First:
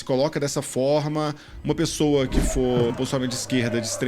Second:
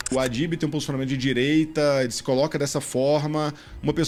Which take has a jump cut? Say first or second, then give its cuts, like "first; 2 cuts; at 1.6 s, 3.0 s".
first; 1 cut; at 2.9 s